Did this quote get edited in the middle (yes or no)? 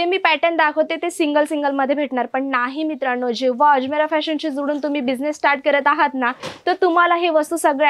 no